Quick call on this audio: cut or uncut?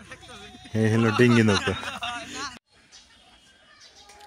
cut